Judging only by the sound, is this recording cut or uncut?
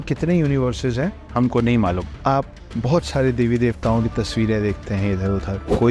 cut